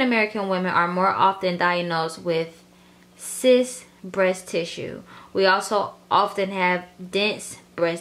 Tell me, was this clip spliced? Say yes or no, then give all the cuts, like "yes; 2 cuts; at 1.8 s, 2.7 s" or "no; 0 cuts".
no; 0 cuts